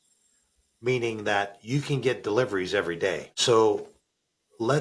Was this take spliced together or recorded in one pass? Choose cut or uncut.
cut